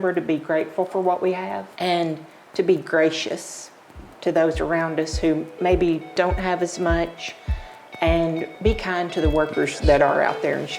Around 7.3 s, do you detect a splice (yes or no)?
no